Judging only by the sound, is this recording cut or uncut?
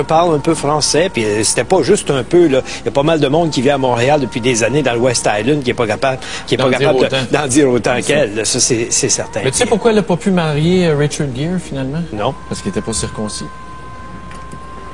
uncut